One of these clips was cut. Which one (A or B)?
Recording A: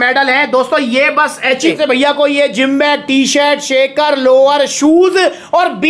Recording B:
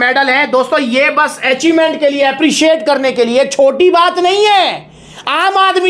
A